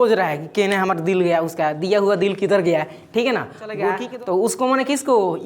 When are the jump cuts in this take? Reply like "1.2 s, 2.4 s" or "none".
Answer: 4.0 s